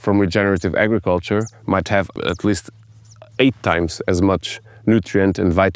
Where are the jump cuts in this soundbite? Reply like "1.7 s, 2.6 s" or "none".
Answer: 2.1 s